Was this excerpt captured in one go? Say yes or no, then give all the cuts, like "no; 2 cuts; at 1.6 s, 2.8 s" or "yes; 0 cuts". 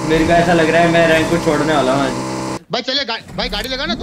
no; 1 cut; at 2.6 s